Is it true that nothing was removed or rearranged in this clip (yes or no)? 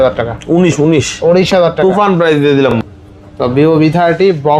no